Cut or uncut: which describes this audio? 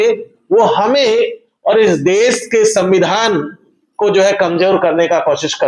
uncut